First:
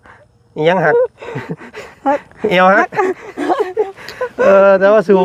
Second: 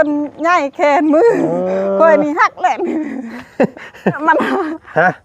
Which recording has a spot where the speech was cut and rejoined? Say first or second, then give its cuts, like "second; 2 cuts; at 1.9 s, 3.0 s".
second; 1 cut; at 4.2 s